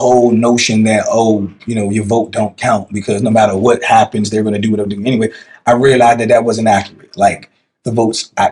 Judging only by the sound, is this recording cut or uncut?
uncut